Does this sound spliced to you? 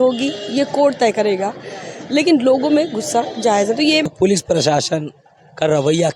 yes; 1 cut; at 4.1 s

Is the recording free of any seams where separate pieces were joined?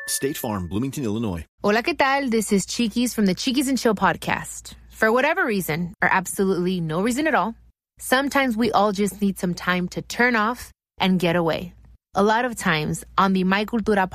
yes; 0 cuts

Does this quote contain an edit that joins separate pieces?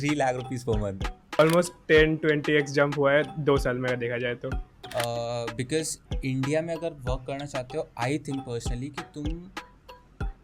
yes; 2 cuts; at 1.4 s, 4.7 s

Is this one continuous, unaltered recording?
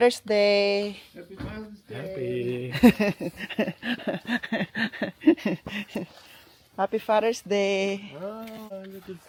yes; 0 cuts

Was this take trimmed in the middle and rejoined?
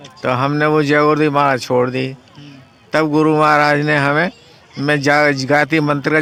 no; 0 cuts

